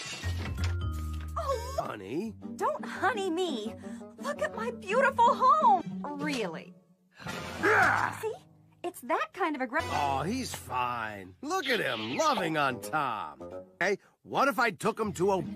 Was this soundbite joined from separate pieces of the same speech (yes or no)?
no